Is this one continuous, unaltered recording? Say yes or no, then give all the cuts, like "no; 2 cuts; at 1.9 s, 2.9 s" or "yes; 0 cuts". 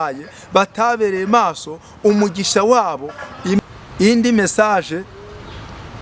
no; 1 cut; at 3.6 s